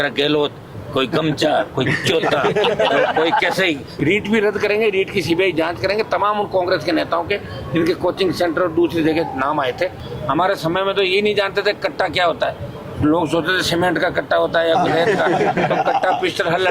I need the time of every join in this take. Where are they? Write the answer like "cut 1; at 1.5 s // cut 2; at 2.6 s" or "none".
cut 1; at 3.9 s // cut 2; at 10.0 s